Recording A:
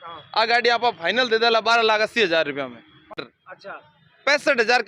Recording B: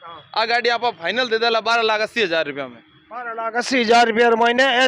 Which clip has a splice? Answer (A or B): A